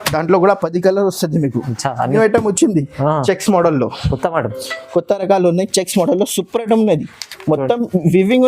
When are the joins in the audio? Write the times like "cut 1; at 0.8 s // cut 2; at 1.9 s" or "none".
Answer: cut 1; at 2.1 s